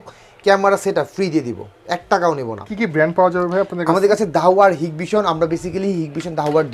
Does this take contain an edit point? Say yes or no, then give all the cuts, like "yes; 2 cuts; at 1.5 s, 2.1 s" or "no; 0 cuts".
no; 0 cuts